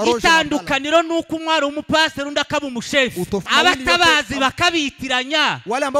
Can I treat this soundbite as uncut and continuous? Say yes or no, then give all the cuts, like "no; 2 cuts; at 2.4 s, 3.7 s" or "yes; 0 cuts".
no; 1 cut; at 3.5 s